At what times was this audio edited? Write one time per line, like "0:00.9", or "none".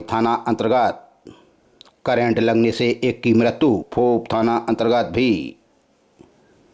0:03.9